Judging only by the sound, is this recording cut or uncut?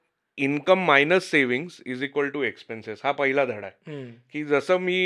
uncut